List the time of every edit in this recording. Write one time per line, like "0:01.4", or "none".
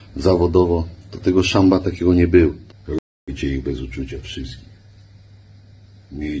0:02.6